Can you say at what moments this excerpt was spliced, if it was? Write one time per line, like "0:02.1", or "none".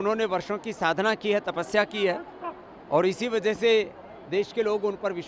none